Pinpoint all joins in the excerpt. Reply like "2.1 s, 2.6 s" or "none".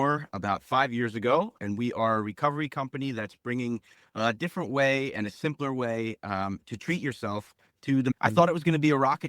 8.1 s